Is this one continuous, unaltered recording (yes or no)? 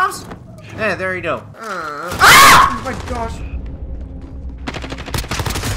no